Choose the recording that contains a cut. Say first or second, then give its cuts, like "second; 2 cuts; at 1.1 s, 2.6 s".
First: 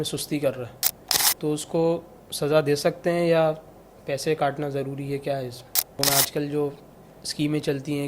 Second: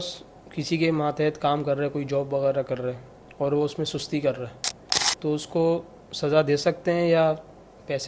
first; 1 cut; at 6.0 s